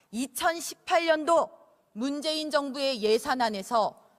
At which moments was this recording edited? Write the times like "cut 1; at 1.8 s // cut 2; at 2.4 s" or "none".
none